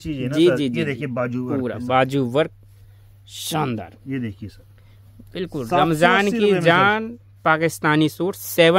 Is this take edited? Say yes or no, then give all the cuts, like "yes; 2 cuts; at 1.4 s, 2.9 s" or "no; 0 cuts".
no; 0 cuts